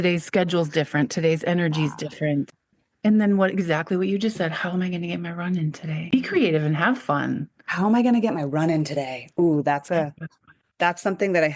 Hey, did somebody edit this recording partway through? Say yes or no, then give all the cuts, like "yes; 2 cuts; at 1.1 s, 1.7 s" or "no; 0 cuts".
yes; 2 cuts; at 2.6 s, 6.1 s